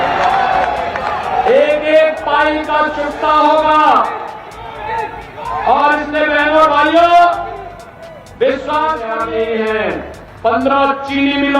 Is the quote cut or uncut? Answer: cut